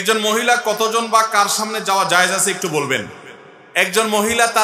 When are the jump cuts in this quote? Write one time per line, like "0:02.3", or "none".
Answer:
none

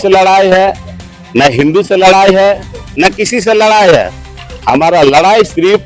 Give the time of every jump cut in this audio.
none

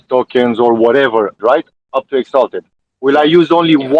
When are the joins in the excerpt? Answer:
0:01.4
0:02.7

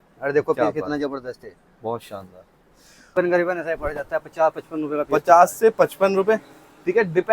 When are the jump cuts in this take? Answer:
0:03.1

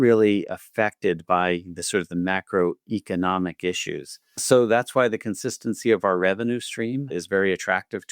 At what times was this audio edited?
0:07.1

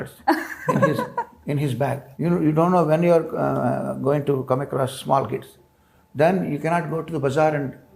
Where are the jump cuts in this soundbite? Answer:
0:02.1

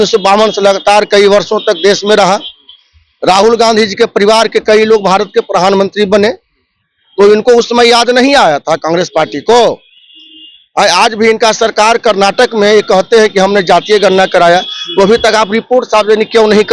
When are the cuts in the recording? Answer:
none

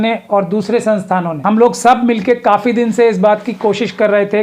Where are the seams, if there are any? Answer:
0:01.4

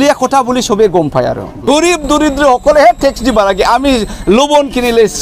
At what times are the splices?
0:01.5

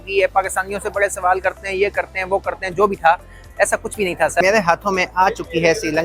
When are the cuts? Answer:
0:04.4

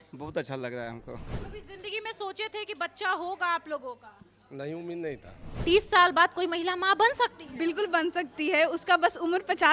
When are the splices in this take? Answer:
0:01.4
0:05.4

